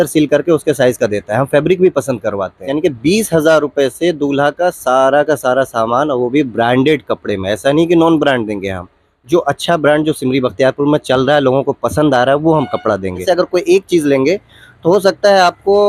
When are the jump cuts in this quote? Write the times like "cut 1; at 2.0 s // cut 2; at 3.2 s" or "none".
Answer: cut 1; at 2.7 s // cut 2; at 13.2 s